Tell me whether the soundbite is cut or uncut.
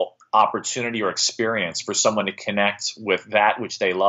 uncut